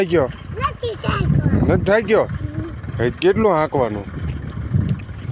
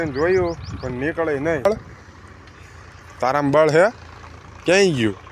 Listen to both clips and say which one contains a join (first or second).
second